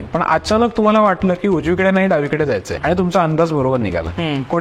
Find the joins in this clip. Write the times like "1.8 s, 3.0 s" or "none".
2.8 s